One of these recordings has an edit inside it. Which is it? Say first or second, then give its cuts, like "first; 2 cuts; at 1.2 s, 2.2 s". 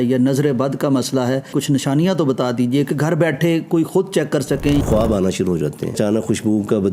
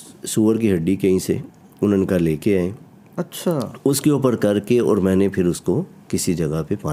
first; 3 cuts; at 1.5 s, 4.8 s, 5.9 s